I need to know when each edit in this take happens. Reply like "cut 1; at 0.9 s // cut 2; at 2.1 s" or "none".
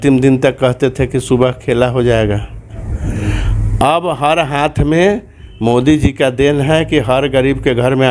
cut 1; at 2.9 s